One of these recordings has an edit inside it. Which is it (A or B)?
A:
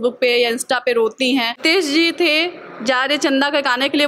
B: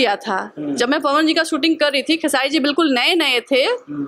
A